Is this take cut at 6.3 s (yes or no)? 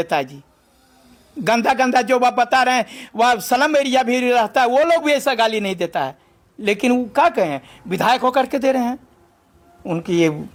no